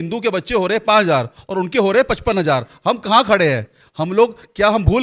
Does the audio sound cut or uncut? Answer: uncut